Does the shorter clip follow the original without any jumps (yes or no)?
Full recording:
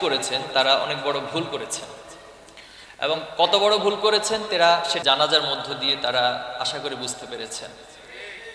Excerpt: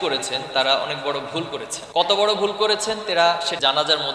no